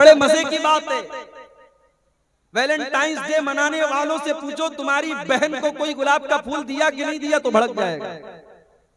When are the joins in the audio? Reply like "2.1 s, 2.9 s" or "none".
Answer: none

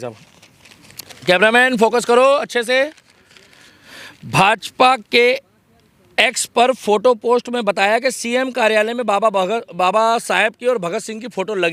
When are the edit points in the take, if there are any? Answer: none

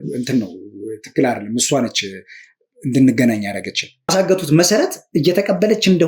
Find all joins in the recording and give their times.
4.1 s

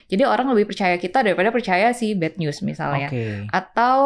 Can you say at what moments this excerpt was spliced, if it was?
none

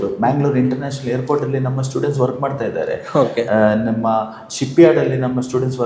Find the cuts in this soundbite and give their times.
none

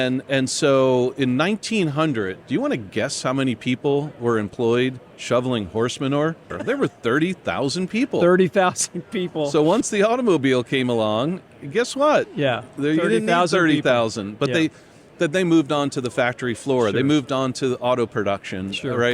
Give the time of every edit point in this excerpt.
6.5 s, 9.8 s

